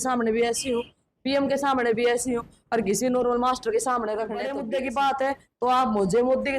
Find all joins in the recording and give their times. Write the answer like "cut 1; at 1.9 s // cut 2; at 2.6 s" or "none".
cut 1; at 4.4 s